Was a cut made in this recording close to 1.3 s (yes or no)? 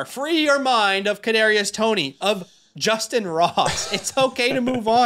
no